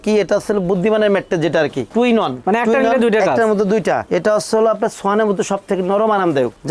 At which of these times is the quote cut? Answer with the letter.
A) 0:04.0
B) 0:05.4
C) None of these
A